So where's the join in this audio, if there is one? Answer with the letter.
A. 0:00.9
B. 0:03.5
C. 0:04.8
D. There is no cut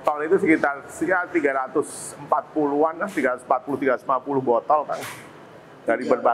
D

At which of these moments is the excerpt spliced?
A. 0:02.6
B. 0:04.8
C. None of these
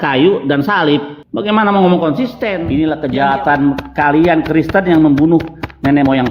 A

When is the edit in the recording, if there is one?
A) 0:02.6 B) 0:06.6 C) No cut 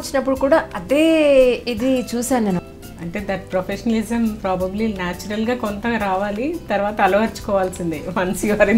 A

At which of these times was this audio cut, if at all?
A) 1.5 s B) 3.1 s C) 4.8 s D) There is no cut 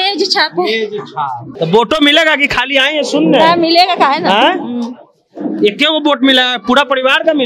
A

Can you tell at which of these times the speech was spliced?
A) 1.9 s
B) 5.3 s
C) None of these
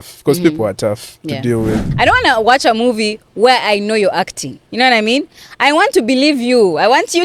A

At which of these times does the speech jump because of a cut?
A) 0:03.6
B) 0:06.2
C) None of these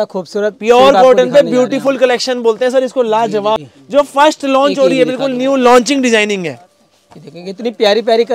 A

